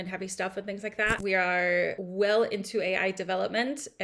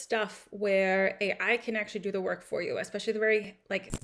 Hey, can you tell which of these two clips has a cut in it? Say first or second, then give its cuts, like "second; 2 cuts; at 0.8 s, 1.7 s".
first; 2 cuts; at 1.2 s, 2.0 s